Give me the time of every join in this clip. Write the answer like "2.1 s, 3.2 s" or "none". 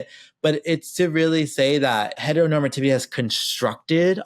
2.2 s